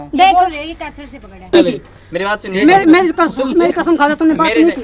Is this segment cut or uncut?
cut